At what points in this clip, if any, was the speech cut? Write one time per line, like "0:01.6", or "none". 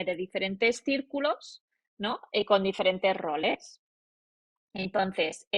none